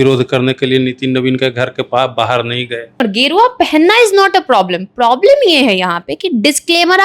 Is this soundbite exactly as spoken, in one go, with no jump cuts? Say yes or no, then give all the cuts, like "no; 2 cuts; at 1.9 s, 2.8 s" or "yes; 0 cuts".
no; 1 cut; at 3.1 s